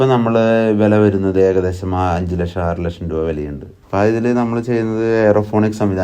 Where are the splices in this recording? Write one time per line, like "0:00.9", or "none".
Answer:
0:03.7